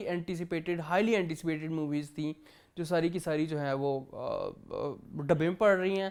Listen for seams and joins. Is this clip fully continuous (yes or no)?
yes